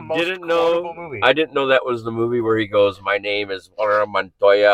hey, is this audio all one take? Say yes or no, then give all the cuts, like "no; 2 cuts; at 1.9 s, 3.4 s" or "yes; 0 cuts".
yes; 0 cuts